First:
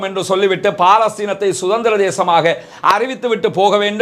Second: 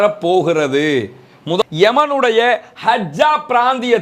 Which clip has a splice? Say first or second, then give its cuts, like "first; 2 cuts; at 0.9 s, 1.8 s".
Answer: second; 1 cut; at 1.6 s